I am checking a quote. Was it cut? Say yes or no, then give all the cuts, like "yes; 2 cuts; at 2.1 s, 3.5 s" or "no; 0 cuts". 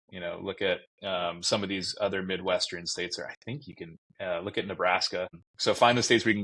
yes; 1 cut; at 5.4 s